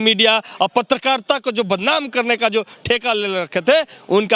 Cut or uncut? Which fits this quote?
uncut